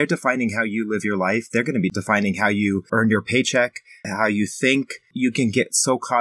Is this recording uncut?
no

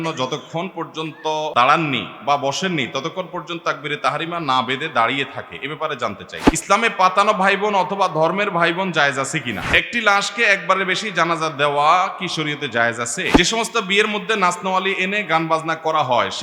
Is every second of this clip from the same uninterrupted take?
no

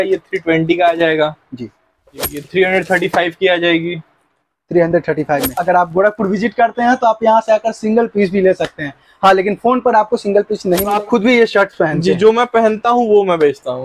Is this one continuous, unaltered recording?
no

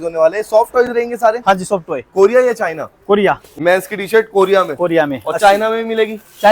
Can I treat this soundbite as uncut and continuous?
no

